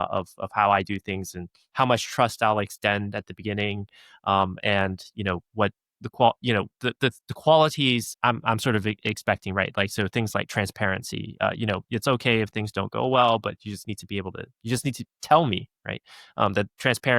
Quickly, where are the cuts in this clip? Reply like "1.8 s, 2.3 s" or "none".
8.1 s